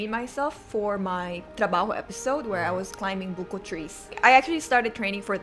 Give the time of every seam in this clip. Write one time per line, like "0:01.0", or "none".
0:04.1